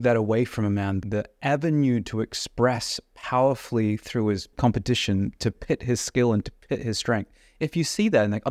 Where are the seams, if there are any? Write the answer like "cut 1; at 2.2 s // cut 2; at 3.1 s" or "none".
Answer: cut 1; at 1.0 s // cut 2; at 4.5 s